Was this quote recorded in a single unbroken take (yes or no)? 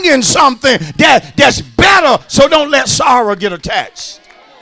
yes